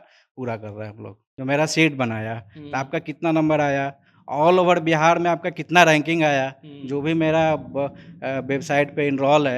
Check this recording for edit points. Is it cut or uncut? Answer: cut